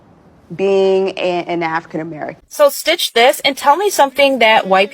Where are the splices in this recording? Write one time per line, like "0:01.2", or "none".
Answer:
0:02.4